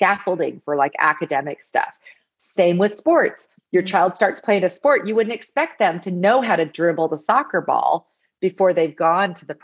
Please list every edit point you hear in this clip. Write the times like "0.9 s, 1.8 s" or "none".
none